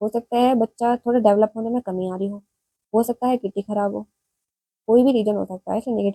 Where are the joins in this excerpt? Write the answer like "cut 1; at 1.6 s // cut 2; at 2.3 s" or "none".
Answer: none